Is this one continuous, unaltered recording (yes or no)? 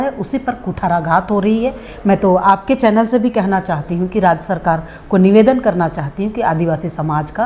yes